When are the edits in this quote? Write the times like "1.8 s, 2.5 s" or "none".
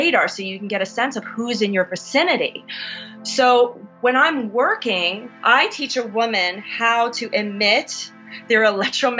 5.2 s, 8.4 s